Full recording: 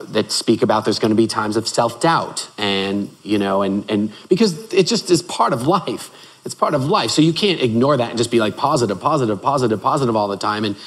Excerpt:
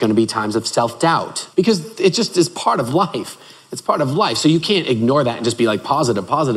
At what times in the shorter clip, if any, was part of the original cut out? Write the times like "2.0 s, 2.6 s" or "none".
1.4 s